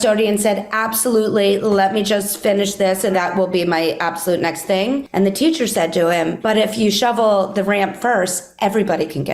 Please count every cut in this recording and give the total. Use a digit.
3